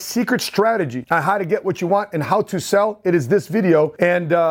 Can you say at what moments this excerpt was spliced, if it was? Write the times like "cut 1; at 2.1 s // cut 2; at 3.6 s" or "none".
cut 1; at 1.0 s

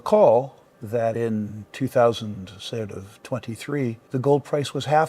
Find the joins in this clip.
cut 1; at 4.0 s

